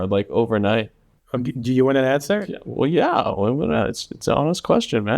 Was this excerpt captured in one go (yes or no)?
yes